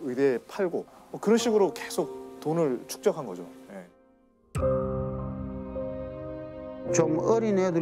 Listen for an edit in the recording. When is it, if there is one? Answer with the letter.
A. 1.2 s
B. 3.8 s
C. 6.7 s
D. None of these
D